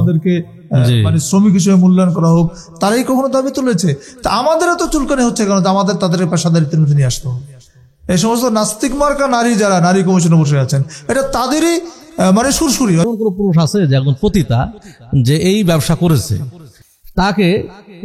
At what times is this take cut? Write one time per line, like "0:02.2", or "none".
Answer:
0:13.0